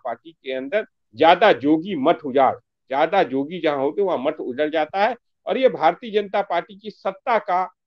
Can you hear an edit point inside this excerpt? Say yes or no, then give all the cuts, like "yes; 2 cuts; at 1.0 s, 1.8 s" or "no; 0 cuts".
no; 0 cuts